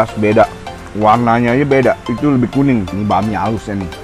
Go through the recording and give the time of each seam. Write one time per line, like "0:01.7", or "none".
0:02.9